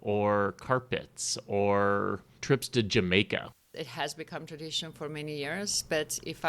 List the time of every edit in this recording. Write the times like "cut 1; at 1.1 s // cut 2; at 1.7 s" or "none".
cut 1; at 2.3 s // cut 2; at 3.5 s